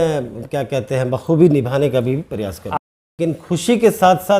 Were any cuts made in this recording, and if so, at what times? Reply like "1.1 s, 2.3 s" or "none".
2.8 s